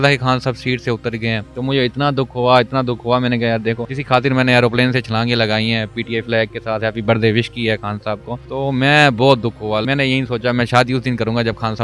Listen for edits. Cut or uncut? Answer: cut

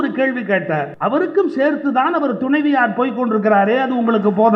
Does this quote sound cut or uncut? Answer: cut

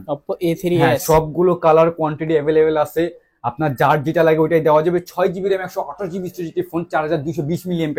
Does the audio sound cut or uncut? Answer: uncut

